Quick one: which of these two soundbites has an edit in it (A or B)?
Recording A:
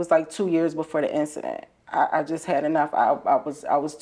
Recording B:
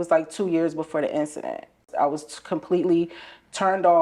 B